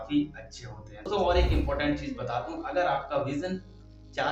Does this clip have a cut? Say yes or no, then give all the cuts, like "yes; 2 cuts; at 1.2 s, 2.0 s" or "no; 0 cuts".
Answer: yes; 1 cut; at 1.1 s